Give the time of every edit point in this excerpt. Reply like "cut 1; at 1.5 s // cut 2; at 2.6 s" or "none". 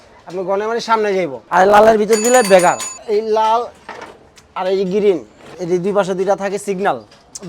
cut 1; at 2.9 s // cut 2; at 5.5 s